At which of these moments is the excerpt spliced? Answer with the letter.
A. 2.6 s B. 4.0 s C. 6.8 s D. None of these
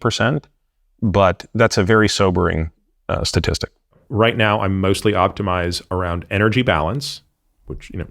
B